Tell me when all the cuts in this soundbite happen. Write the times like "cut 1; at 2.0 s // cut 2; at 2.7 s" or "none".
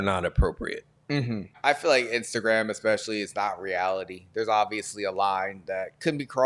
cut 1; at 1.5 s